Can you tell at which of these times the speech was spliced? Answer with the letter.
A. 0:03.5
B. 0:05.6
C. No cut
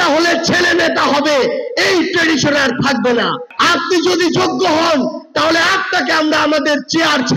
A